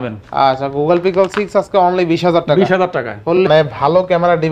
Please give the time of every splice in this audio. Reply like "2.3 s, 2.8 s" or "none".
3.4 s